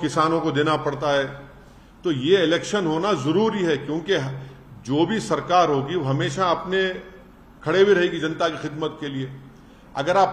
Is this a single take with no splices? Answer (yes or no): yes